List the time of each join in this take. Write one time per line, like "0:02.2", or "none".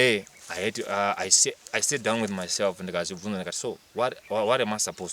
none